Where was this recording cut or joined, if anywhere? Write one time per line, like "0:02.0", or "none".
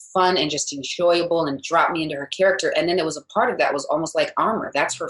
none